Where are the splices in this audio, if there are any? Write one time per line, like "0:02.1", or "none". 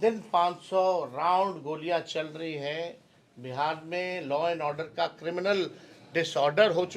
none